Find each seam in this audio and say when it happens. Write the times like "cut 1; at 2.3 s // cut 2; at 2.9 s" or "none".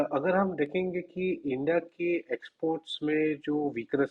none